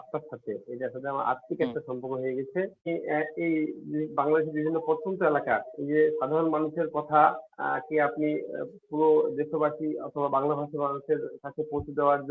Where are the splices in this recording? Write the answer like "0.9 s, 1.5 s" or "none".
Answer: 2.9 s

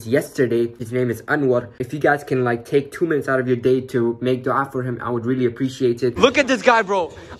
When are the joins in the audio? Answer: 0.8 s, 1.8 s, 6.1 s

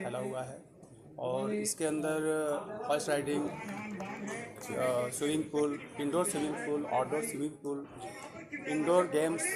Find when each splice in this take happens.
none

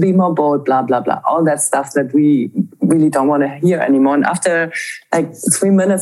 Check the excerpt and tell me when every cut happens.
none

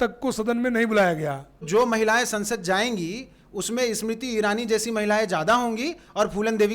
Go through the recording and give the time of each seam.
1.7 s

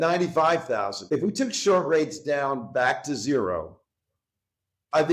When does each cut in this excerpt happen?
1.0 s

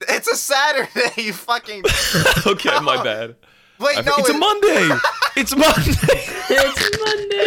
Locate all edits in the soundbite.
none

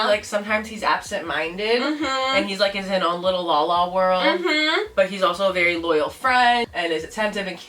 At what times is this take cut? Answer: 6.6 s

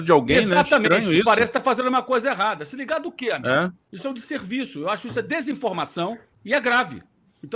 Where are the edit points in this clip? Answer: 3.9 s, 6.3 s

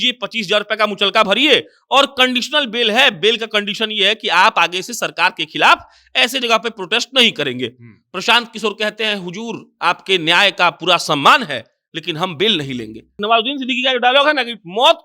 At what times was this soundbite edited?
13.2 s

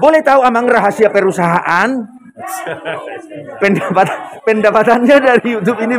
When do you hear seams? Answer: none

